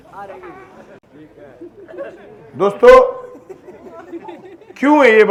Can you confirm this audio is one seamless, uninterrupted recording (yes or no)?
yes